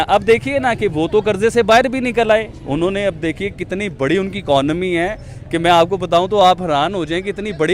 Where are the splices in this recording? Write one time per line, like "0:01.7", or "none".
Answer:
none